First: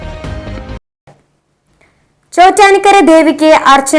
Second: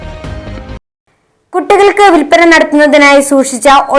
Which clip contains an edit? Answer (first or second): second